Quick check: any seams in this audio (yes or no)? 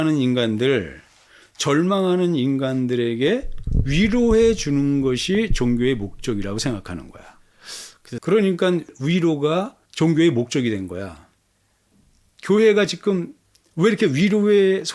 yes